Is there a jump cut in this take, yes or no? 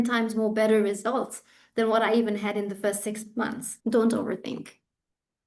yes